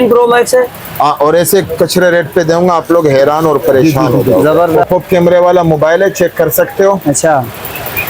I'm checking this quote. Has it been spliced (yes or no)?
yes